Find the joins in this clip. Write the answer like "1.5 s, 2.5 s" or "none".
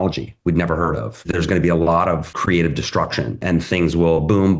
1.3 s, 2.3 s